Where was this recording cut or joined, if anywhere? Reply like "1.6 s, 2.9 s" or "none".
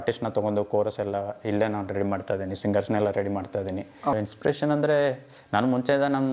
4.1 s

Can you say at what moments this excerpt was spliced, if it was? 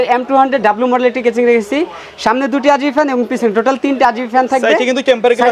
none

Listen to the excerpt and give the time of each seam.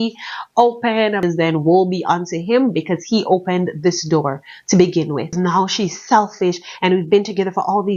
1.2 s, 5.4 s

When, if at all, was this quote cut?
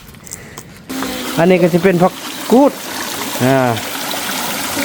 0.9 s

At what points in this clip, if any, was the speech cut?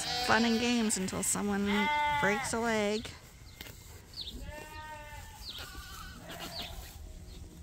none

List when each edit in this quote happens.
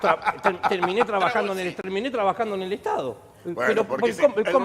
1.8 s

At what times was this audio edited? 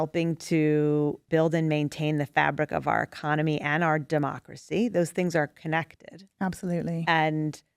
1.2 s

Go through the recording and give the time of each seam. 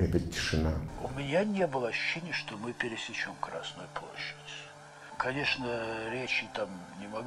0.9 s

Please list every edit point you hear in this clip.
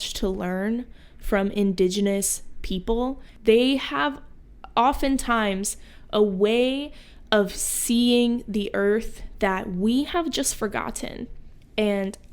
3.3 s

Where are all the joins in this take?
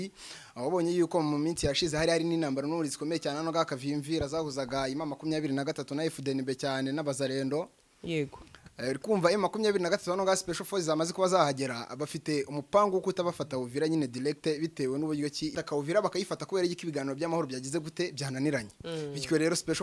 15.5 s

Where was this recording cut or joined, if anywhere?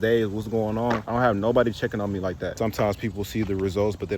1.0 s, 2.5 s

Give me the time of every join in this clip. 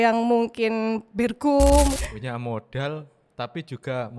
2.0 s

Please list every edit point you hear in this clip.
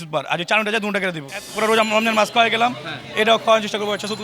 1.4 s

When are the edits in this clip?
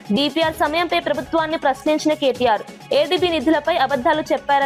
none

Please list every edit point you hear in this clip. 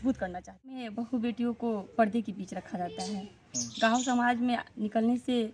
0.9 s

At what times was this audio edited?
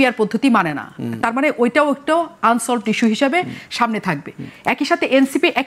none

